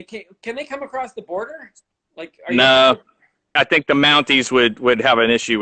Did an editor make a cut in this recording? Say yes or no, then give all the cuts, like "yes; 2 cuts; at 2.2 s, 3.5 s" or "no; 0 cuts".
yes; 1 cut; at 3.5 s